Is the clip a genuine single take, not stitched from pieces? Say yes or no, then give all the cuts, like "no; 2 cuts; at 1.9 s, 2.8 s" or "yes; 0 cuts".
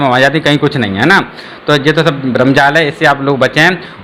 yes; 0 cuts